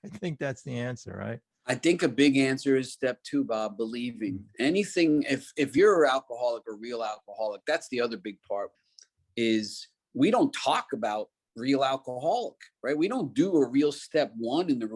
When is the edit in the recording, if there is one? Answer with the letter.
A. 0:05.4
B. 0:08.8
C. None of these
B